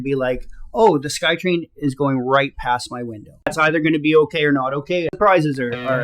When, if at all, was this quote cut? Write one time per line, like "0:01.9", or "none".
0:03.5
0:05.2

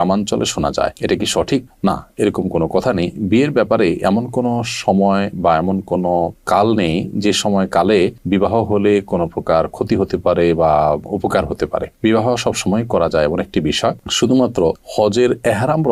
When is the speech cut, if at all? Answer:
none

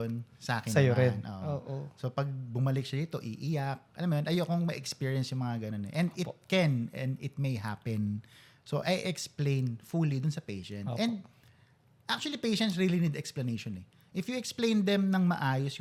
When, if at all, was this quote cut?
none

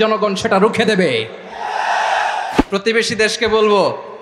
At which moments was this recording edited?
0:02.6

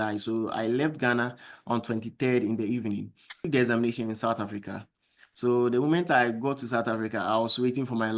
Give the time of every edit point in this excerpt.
0:03.4

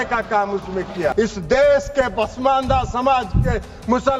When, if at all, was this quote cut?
0:01.1

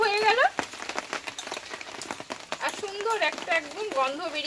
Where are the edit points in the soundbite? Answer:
0:02.3

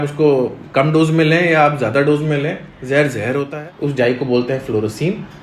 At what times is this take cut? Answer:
0:03.5

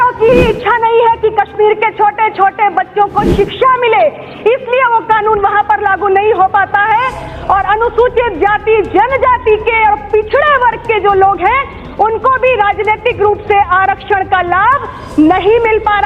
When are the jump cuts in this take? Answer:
none

